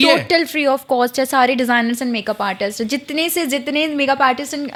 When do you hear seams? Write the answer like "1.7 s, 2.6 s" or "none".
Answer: none